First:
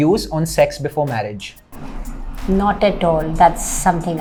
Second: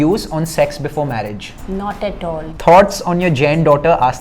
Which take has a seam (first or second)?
second